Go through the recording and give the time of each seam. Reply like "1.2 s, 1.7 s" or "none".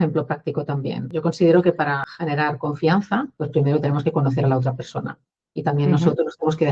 1.0 s, 2.1 s, 3.4 s